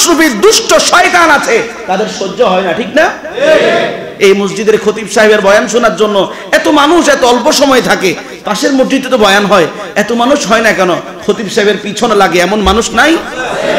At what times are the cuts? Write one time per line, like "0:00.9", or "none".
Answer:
none